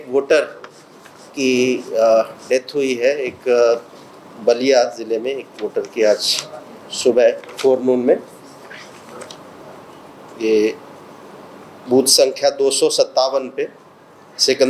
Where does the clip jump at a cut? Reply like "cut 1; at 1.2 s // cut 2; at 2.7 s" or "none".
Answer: none

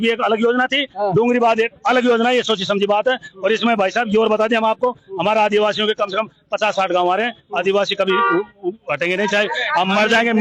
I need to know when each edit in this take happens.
none

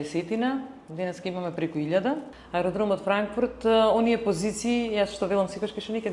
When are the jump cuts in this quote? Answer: cut 1; at 2.3 s

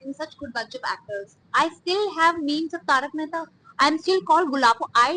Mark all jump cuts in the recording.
cut 1; at 1.3 s

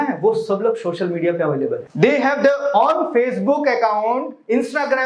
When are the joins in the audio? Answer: cut 1; at 1.9 s

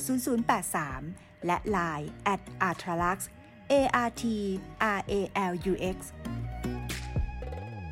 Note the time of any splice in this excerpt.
cut 1; at 6.1 s

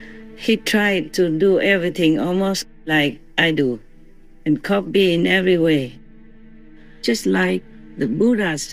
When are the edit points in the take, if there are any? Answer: cut 1; at 6.5 s

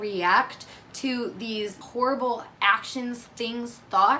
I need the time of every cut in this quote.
cut 1; at 1.8 s

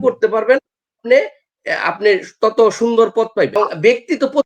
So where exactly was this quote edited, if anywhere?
cut 1; at 3.5 s

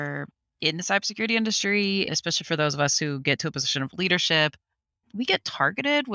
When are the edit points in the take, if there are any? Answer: cut 1; at 2.1 s // cut 2; at 4.9 s

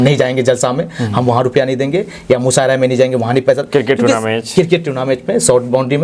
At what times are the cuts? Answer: none

